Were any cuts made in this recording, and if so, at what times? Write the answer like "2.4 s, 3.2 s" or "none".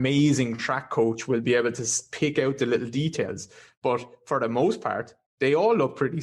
none